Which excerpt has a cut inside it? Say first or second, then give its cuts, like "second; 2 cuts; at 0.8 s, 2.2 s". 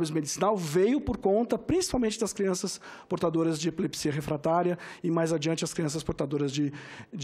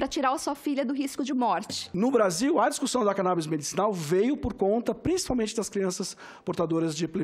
second; 1 cut; at 1.9 s